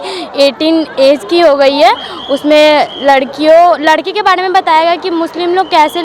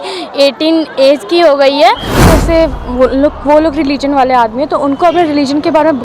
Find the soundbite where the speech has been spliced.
second; 1 cut; at 2.2 s

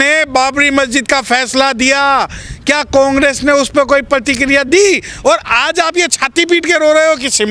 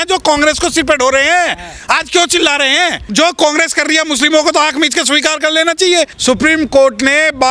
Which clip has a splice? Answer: second; 2 cuts; at 3.1 s, 6.2 s

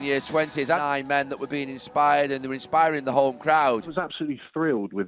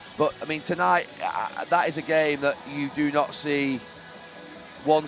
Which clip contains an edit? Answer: first; 2 cuts; at 0.8 s, 3.9 s

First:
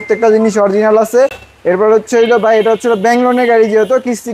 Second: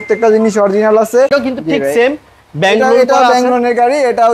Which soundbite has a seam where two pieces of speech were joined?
second; 1 cut; at 1.3 s

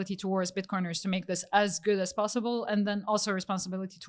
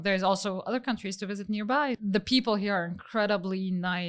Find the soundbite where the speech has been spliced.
second; 1 cut; at 2.0 s

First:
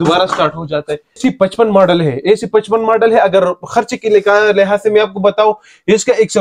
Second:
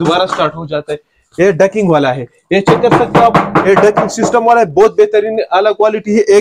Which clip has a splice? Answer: first; 1 cut; at 1.2 s

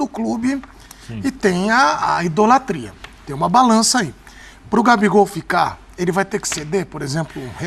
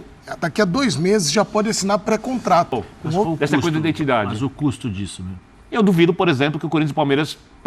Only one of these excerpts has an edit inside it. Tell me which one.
second; 1 cut; at 3.3 s

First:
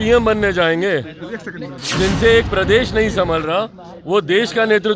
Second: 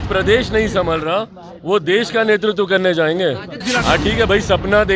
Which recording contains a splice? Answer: second; 1 cut; at 3.5 s

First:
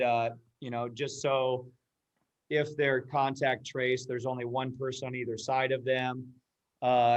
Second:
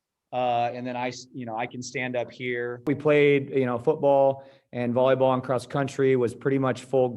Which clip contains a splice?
second; 1 cut; at 2.9 s

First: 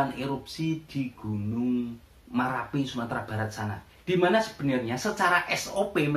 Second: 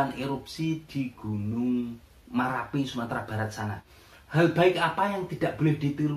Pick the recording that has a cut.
second; 1 cut; at 3.9 s

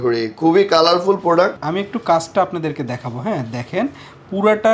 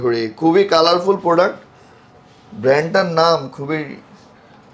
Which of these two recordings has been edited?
first; 1 cut; at 1.6 s

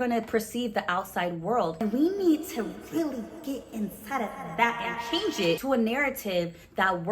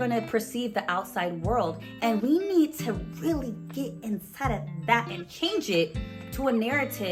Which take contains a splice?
first; 2 cuts; at 1.8 s, 5.6 s

